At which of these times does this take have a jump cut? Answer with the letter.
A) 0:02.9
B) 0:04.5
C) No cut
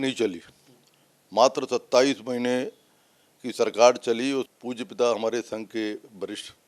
B